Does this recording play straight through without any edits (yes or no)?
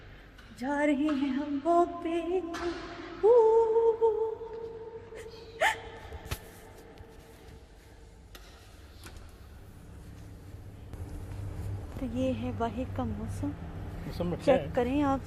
yes